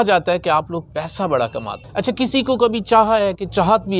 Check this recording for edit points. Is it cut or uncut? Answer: cut